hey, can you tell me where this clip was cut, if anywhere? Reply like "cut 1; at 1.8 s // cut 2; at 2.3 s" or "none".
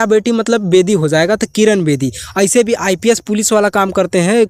none